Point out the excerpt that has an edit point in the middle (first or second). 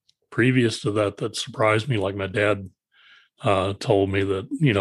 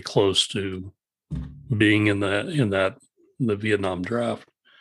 second